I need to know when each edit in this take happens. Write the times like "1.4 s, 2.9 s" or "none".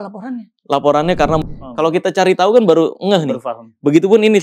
1.4 s